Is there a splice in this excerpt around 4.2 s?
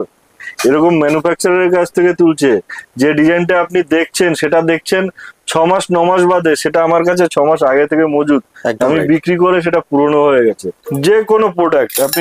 no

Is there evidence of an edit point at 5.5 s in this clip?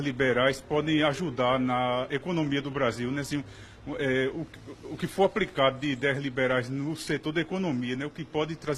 yes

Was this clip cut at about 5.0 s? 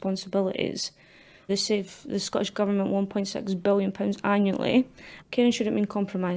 yes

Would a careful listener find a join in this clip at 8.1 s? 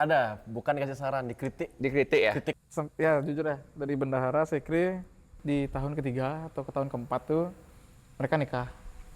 no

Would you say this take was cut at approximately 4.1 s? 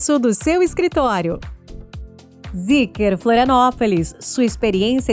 no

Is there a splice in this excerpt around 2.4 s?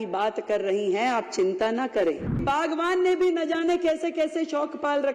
yes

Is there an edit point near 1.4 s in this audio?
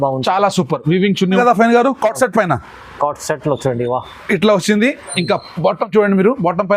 yes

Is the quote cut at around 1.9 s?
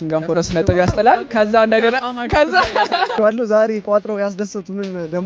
no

